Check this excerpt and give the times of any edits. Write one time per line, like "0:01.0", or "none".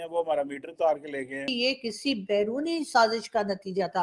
0:01.5